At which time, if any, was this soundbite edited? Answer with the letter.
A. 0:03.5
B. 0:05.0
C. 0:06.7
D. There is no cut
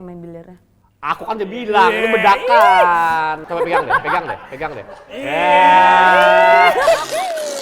A